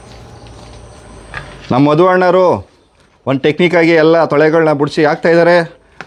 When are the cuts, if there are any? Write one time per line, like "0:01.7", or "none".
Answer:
none